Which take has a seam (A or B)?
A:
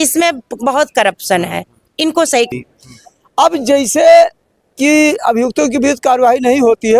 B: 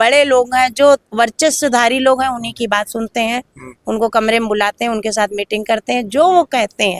A